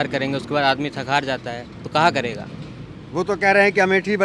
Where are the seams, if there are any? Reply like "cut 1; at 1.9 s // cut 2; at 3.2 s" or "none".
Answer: none

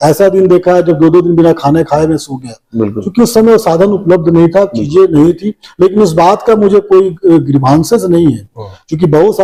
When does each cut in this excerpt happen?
none

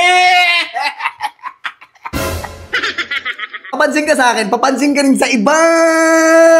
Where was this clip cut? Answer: cut 1; at 3.8 s

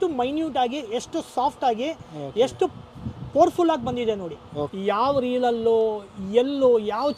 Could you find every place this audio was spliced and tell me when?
cut 1; at 4.7 s

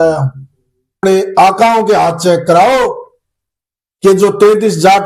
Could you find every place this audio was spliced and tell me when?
cut 1; at 1.0 s

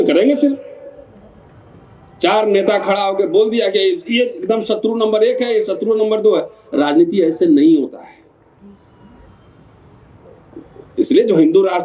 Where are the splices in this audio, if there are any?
none

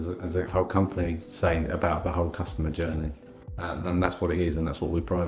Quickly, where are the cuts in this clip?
none

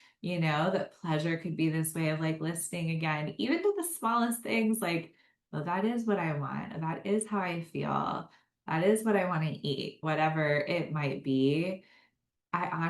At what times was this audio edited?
cut 1; at 10.0 s

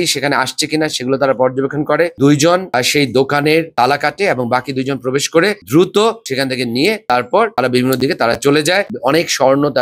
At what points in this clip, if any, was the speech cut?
cut 1; at 2.7 s // cut 2; at 5.6 s // cut 3; at 8.8 s

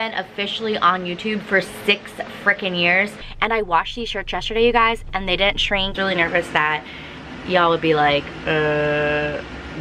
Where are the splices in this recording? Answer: cut 1; at 3.2 s // cut 2; at 5.9 s

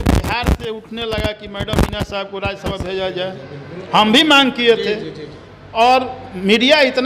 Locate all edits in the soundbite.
none

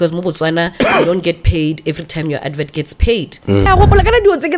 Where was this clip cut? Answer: cut 1; at 3.7 s

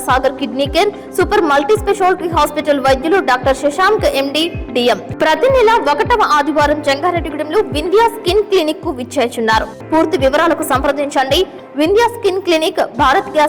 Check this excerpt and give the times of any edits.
cut 1; at 5.1 s // cut 2; at 9.7 s

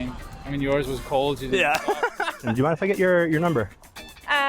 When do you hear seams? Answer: cut 1; at 2.5 s

